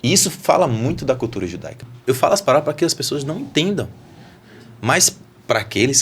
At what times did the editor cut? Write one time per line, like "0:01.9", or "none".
0:01.9